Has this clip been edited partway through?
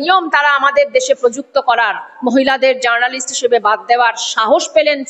no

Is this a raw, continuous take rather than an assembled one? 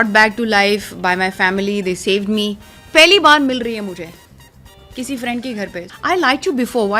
no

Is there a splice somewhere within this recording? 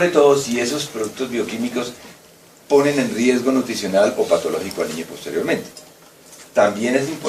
yes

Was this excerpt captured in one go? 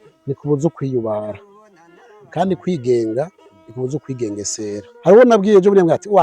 no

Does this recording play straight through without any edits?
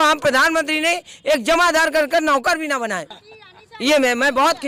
yes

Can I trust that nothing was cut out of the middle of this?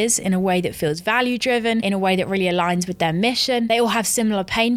no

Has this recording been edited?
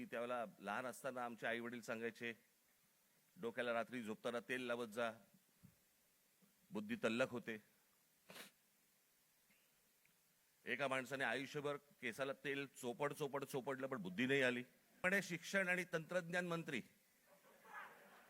yes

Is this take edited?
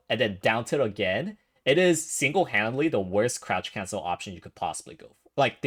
no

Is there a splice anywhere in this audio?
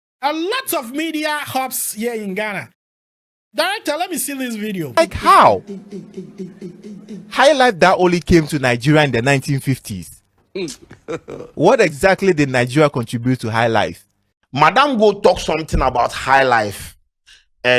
yes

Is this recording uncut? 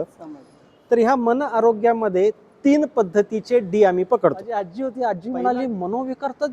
no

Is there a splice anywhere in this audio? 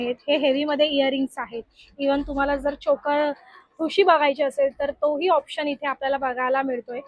no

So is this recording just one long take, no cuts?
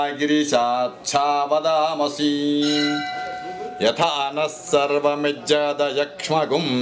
no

